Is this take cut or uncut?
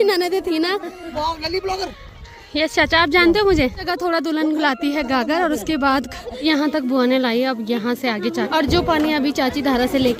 cut